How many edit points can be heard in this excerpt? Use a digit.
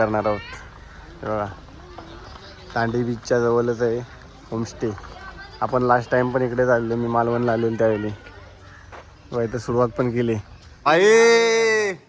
1